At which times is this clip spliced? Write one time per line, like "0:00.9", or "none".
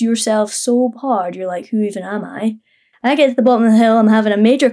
0:02.9